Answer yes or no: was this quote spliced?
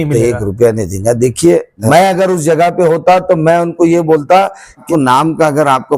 yes